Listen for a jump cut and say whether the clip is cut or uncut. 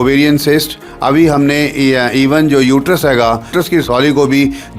cut